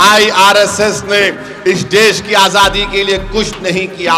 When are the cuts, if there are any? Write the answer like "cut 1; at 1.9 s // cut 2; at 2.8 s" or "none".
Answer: none